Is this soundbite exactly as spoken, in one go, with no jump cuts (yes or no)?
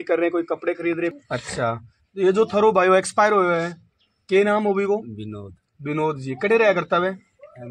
no